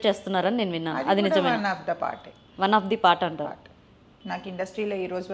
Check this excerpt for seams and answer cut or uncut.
uncut